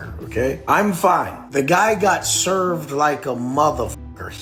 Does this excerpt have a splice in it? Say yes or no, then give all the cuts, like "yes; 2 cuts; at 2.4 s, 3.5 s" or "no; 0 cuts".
no; 0 cuts